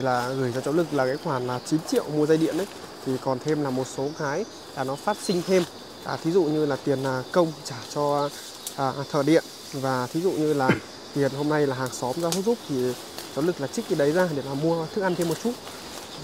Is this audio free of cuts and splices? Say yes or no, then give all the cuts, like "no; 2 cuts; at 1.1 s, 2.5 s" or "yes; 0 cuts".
yes; 0 cuts